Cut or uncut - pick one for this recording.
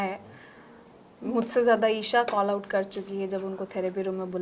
uncut